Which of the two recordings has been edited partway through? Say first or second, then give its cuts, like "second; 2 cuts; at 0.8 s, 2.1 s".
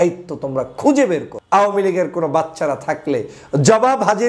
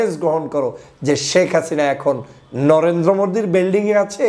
first; 1 cut; at 1.3 s